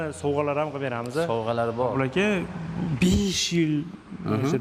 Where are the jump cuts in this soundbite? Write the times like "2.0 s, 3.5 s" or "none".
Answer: 1.9 s